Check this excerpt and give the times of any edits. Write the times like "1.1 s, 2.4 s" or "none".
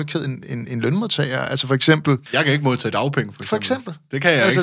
2.3 s